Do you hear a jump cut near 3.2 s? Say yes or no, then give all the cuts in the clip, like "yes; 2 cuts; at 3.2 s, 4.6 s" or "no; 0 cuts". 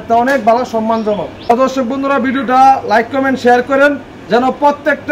no; 1 cut; at 1.6 s